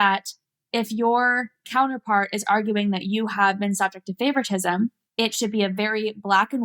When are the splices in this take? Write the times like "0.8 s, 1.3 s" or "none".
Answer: 1.7 s, 5.0 s

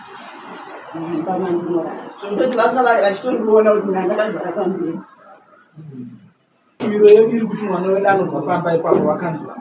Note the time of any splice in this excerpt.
6.8 s

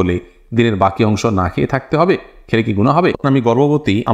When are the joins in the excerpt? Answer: 3.2 s

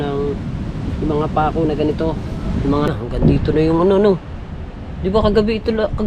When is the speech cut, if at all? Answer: 2.9 s

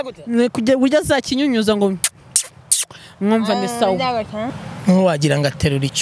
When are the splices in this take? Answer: 4.6 s

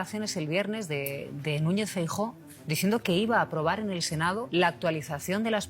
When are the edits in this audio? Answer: 4.5 s

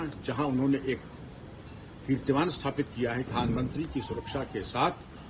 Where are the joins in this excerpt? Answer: 3.3 s

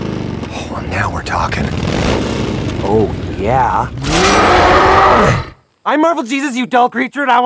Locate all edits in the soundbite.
none

